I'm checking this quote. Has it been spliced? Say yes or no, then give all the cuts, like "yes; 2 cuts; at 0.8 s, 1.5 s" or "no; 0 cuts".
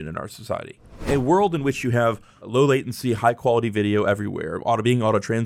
yes; 2 cuts; at 1.1 s, 2.5 s